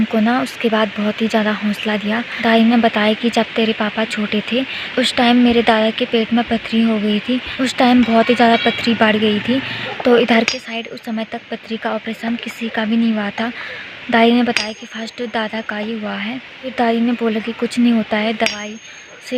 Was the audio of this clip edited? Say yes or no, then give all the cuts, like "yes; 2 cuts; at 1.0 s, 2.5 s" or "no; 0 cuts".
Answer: no; 0 cuts